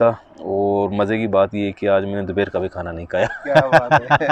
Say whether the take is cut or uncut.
uncut